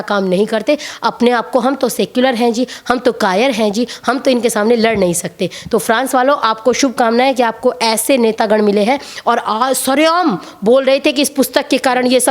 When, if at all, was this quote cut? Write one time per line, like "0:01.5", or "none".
none